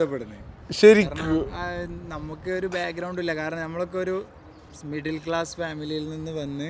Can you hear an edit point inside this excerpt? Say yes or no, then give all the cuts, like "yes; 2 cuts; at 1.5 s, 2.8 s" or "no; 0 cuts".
no; 0 cuts